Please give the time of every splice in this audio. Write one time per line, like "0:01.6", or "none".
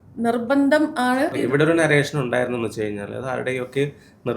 0:01.3